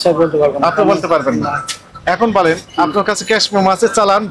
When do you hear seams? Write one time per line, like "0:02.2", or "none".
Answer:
none